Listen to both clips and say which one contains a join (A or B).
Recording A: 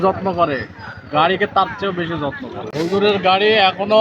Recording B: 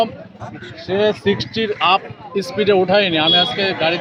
A